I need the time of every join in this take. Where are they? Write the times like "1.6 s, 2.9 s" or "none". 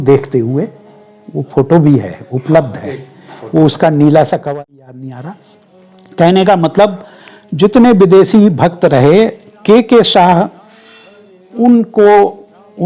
5.0 s